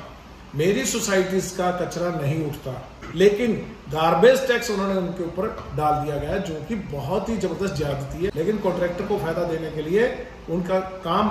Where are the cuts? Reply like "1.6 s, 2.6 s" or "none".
3.0 s, 8.3 s